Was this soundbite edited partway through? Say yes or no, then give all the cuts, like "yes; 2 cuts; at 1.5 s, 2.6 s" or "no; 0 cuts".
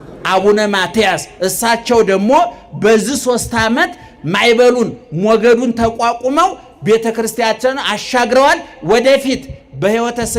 no; 0 cuts